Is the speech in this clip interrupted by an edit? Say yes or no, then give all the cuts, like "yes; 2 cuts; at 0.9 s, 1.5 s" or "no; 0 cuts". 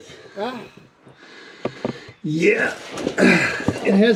no; 0 cuts